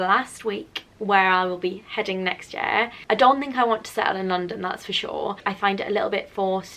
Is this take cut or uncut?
cut